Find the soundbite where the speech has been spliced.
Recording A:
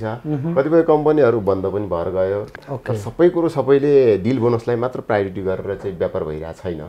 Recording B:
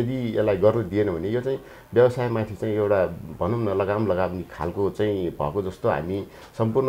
A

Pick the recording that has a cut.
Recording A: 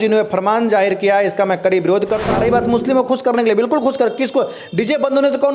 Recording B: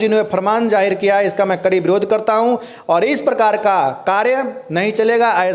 A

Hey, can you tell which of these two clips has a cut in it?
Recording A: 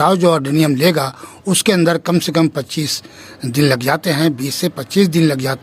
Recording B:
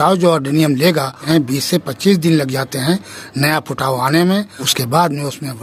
B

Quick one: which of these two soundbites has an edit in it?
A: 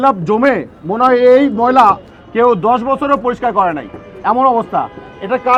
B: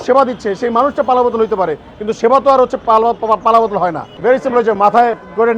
B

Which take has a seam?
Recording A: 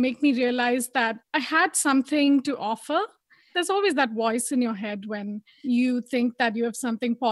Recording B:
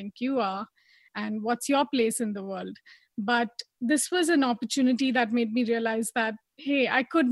A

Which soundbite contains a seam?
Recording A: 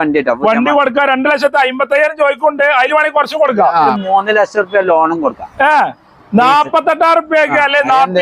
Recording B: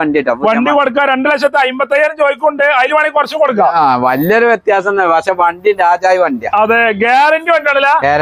A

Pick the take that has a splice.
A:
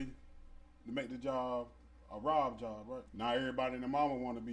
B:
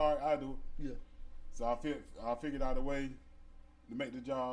A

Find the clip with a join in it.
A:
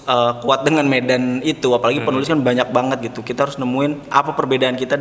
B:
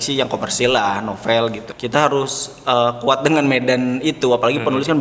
B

